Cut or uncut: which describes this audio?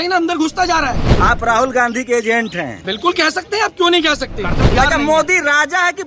cut